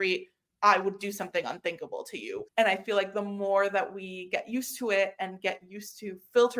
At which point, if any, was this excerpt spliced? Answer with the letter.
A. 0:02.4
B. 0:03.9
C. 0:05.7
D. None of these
A